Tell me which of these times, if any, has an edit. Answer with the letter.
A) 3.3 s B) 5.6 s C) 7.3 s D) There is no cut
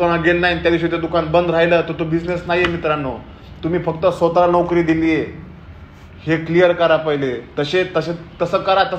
D